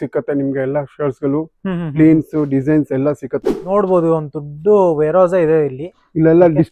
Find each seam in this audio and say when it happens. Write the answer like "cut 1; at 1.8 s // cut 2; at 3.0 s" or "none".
cut 1; at 3.5 s

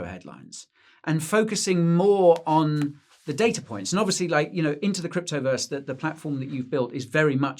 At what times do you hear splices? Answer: none

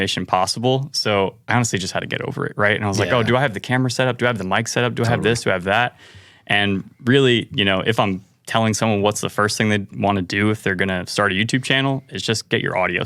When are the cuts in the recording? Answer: none

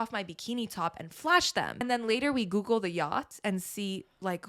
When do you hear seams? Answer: cut 1; at 1.8 s

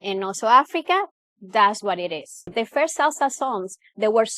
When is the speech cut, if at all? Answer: cut 1; at 2.4 s

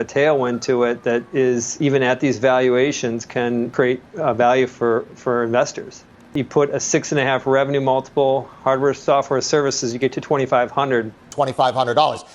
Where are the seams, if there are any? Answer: cut 1; at 1.8 s // cut 2; at 3.7 s // cut 3; at 6.3 s // cut 4; at 11.3 s

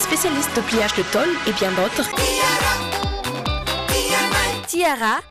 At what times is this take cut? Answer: cut 1; at 2.1 s

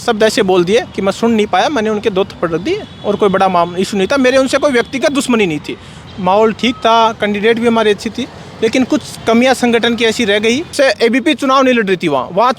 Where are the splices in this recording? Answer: cut 1; at 6.0 s // cut 2; at 10.7 s

